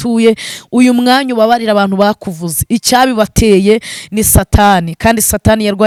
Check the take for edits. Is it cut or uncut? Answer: uncut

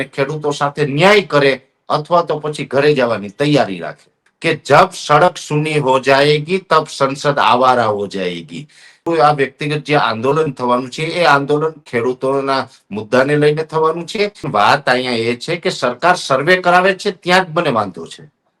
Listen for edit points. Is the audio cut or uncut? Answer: cut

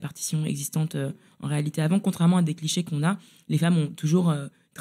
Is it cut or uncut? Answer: uncut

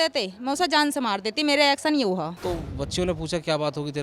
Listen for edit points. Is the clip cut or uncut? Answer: cut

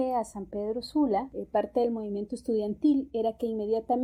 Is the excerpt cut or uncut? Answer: uncut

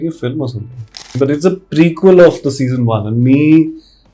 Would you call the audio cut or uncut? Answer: cut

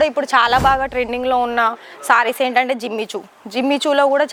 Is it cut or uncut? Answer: uncut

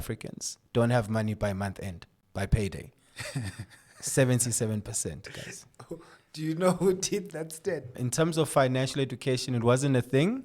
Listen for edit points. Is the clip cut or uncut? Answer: cut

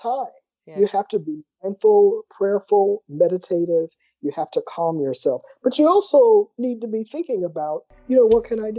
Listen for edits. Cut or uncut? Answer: uncut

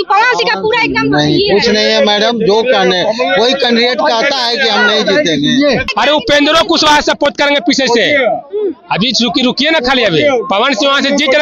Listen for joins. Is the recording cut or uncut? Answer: cut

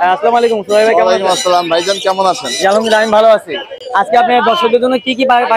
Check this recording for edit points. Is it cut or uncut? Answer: uncut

